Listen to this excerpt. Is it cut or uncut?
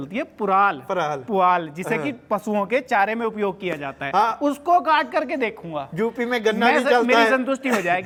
uncut